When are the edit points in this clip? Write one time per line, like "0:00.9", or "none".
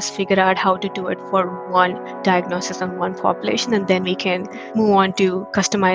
none

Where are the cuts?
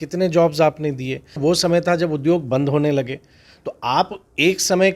0:01.4

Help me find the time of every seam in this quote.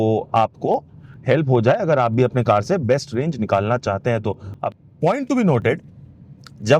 0:04.8

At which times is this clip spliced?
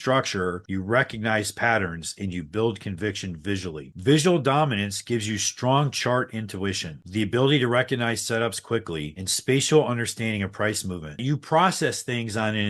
0:11.1

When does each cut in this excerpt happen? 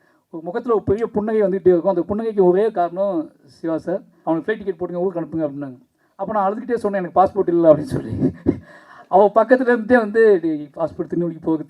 0:04.1

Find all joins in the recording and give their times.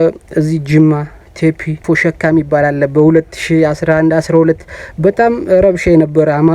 0:01.8

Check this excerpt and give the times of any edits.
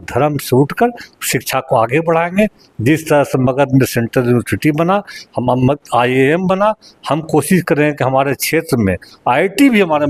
none

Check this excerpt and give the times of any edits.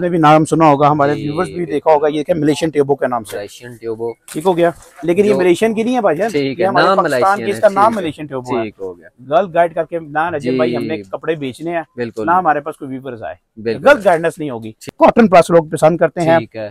0:14.9

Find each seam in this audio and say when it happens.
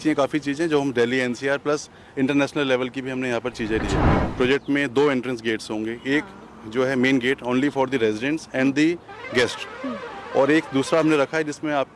0:04.2

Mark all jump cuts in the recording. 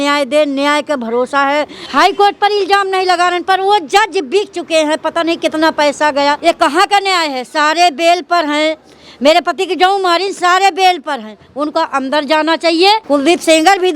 0:01.8
0:06.4
0:13.0

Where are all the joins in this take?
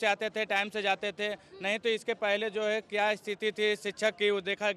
none

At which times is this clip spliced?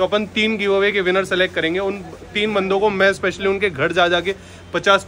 none

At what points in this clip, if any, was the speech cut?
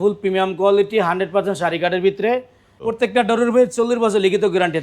0:02.9

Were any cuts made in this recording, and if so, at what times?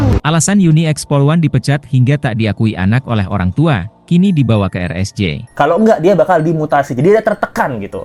0:05.4

